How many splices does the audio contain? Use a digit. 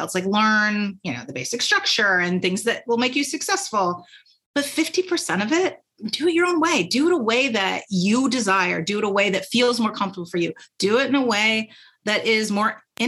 0